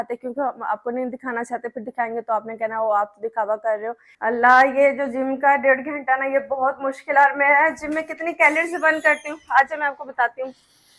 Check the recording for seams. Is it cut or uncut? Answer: cut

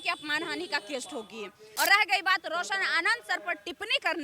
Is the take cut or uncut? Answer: cut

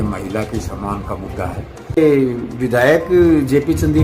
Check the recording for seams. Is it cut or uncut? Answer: cut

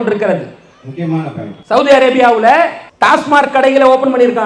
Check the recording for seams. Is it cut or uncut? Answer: cut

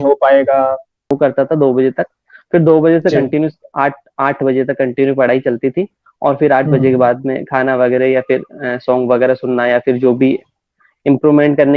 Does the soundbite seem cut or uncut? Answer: cut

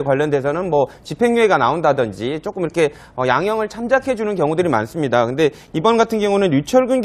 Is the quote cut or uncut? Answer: cut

